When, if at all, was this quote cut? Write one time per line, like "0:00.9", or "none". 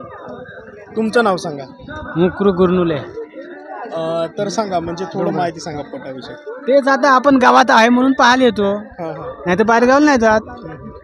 none